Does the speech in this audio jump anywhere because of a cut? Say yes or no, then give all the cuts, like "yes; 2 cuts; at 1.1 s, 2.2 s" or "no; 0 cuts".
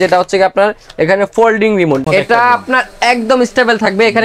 yes; 1 cut; at 2.0 s